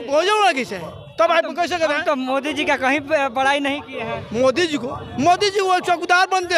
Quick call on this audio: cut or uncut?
uncut